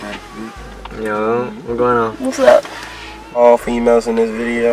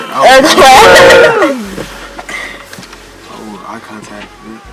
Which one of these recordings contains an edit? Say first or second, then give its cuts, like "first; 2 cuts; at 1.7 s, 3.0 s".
first; 1 cut; at 3.4 s